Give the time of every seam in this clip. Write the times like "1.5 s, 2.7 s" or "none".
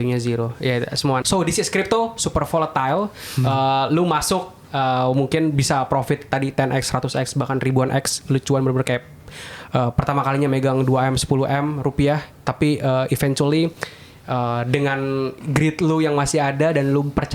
1.2 s